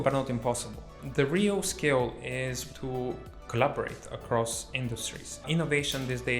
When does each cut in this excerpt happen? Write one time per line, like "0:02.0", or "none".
0:01.0
0:02.6
0:05.5